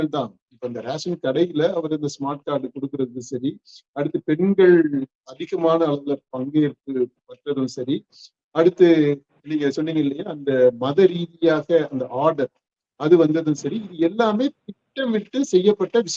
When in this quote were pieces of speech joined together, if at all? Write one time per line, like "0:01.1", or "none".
none